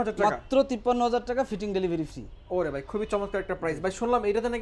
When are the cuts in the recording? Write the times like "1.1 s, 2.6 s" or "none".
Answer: none